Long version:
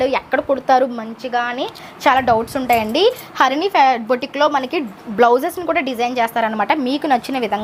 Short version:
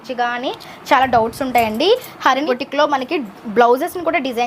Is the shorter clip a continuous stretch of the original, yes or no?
no